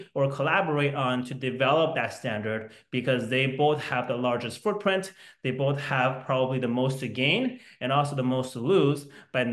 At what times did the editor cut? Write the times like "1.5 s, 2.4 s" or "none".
none